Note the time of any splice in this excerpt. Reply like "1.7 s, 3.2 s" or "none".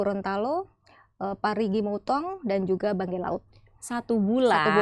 none

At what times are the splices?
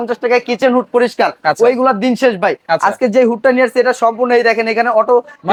none

